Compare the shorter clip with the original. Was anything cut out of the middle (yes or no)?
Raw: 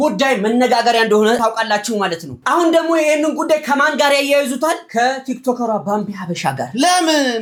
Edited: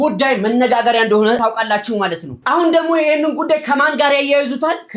no